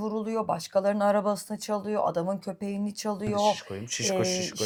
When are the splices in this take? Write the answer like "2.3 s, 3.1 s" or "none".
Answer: none